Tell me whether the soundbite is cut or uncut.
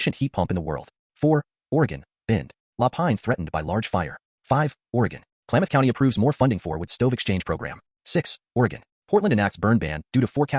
cut